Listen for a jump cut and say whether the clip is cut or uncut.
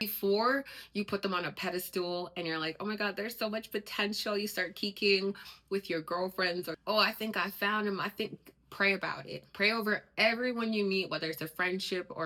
uncut